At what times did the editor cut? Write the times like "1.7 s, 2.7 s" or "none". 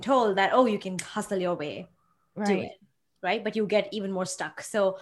none